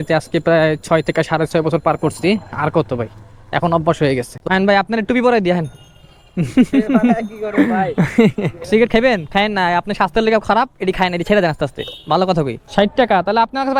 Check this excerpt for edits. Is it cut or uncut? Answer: cut